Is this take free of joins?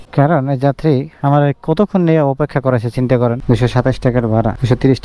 no; 1 cut; at 3.4 s

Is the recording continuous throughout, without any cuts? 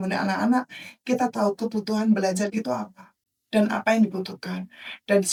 yes; 0 cuts

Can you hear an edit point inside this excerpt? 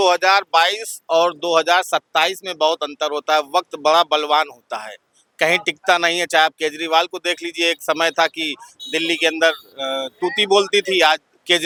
no; 0 cuts

